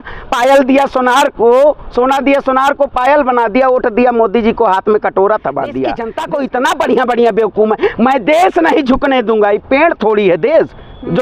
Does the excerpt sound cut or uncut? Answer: cut